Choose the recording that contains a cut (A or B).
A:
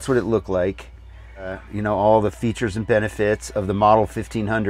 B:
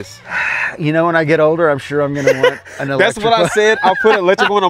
A